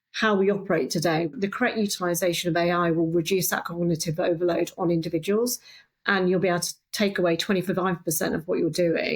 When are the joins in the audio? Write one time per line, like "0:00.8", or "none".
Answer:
0:01.3